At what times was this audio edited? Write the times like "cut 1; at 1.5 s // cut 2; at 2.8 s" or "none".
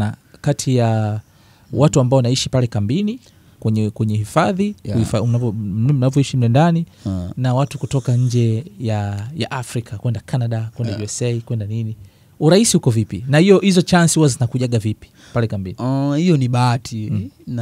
none

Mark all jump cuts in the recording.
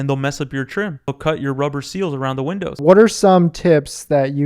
cut 1; at 2.7 s

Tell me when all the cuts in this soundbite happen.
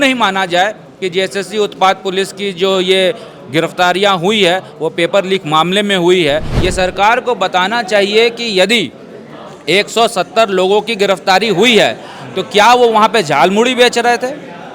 cut 1; at 6.5 s

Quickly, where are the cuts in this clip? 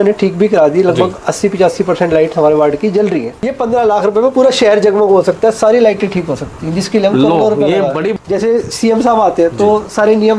cut 1; at 3.4 s // cut 2; at 8.1 s

